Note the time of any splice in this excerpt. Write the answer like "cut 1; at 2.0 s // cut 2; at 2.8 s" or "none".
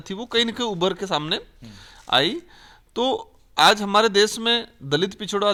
none